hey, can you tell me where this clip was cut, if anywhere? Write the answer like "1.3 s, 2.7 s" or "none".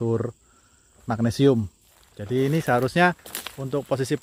none